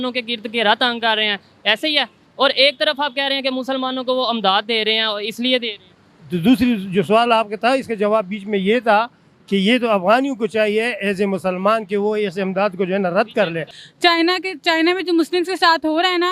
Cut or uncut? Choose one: cut